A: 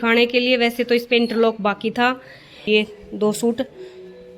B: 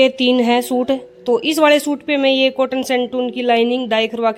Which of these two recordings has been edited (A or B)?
A